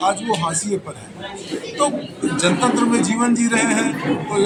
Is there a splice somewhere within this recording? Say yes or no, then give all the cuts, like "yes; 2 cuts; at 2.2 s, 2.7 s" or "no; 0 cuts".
no; 0 cuts